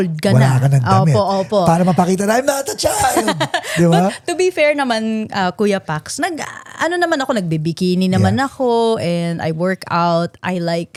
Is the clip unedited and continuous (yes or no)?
yes